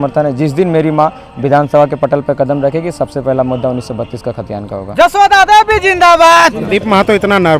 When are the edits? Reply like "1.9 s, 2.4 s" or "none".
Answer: 6.6 s